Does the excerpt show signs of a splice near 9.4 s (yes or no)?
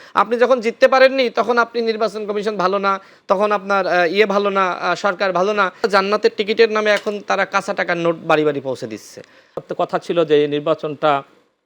yes